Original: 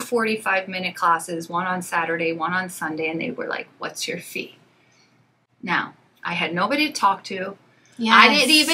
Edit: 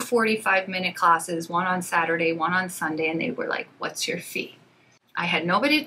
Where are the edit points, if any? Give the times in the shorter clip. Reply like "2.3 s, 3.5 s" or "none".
5.0 s